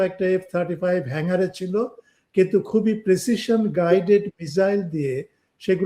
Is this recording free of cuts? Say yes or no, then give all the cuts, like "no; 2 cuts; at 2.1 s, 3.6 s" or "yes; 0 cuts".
yes; 0 cuts